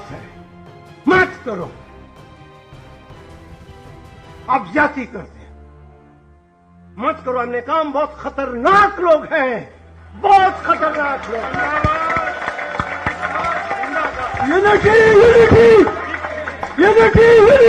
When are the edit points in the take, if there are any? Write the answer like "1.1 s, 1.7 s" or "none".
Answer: 1.9 s, 4.5 s, 5.3 s, 7.0 s

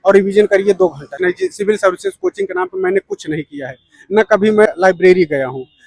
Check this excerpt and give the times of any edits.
1.1 s, 4.7 s

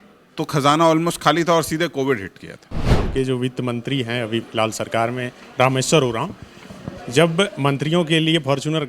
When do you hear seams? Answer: 3.0 s

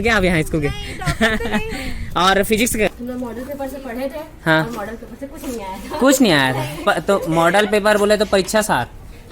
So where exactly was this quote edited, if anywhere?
2.9 s

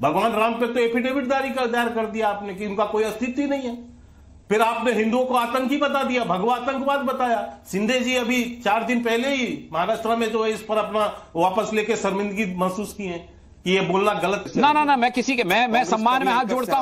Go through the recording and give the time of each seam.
14.5 s

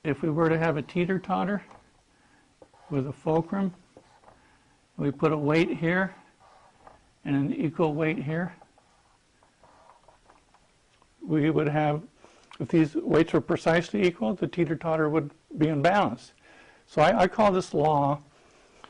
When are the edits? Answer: 11.7 s

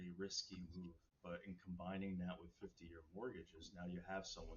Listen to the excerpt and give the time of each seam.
1.1 s

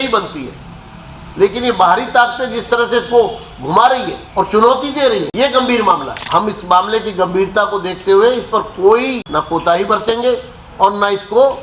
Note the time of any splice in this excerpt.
4.2 s, 5.3 s, 6.1 s, 9.2 s, 10.6 s

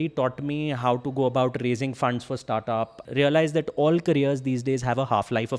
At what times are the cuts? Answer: 3.0 s

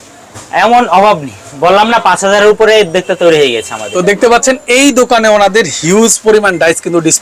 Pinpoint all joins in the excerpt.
3.9 s

